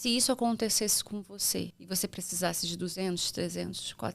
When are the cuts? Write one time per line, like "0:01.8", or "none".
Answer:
0:01.8